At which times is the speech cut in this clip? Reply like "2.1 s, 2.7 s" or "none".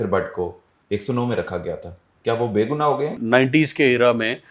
3.2 s